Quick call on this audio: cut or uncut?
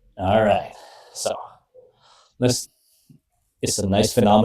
cut